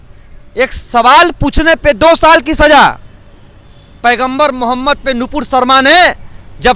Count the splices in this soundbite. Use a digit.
0